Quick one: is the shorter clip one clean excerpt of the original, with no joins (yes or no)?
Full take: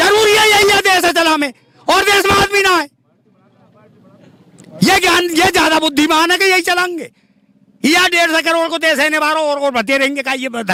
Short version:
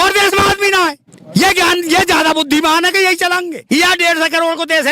no